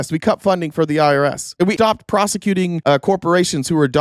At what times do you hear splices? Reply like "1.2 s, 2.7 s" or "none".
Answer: 1.6 s